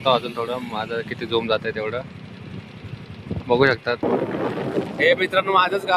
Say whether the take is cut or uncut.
cut